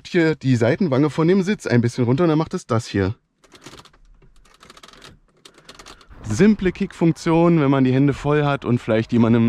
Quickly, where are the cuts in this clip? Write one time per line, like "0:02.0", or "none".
0:06.0